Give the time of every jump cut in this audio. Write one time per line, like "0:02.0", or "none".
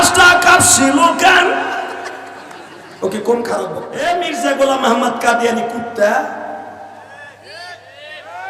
0:03.9